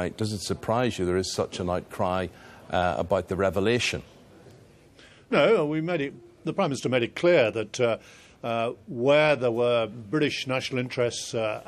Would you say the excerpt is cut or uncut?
uncut